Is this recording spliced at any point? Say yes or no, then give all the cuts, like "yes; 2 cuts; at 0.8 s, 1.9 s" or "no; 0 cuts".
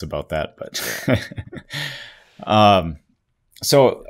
no; 0 cuts